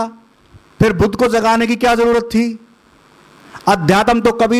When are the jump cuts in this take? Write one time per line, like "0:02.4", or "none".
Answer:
none